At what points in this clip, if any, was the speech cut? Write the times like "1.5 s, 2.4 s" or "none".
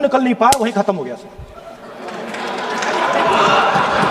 none